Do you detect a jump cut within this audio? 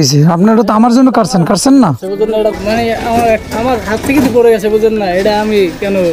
yes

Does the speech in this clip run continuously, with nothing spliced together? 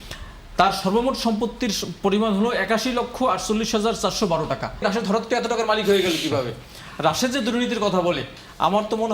no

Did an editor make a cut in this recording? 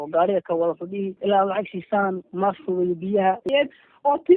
yes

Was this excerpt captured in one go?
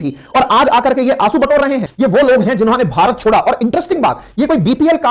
no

